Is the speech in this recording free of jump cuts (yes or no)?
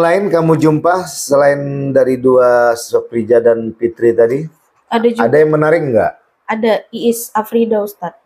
yes